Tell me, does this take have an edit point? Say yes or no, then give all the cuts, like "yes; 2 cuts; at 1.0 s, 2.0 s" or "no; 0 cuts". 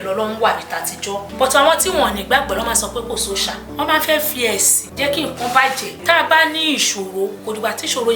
yes; 5 cuts; at 1.3 s, 3.6 s, 4.8 s, 5.9 s, 7.4 s